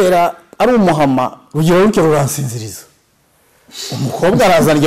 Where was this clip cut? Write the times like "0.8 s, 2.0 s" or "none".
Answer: none

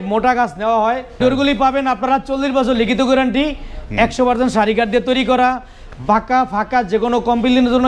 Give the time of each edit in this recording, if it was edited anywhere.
1.2 s

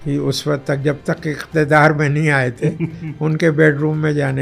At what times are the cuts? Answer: none

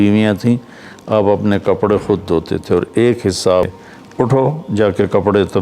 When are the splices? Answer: 3.7 s

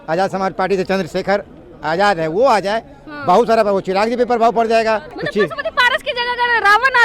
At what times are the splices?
5.1 s

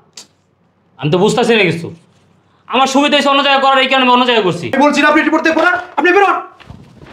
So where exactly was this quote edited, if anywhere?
4.7 s

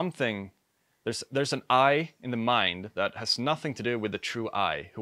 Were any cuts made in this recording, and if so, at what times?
none

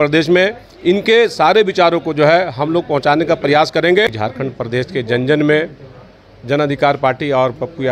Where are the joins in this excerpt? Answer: 4.1 s

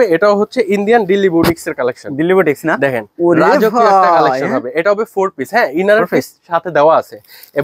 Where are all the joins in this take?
none

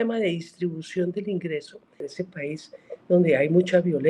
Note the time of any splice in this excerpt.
2.0 s

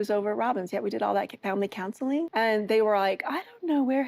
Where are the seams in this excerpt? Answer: 2.3 s

